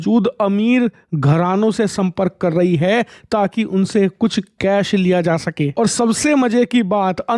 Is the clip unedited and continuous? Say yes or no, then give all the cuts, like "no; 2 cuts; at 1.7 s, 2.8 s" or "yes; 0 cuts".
yes; 0 cuts